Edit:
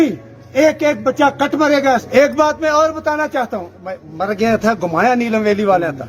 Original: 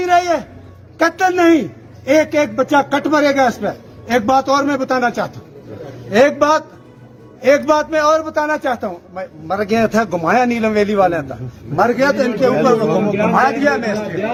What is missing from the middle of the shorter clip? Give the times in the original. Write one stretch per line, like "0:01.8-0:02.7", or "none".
0:03.6-0:07.4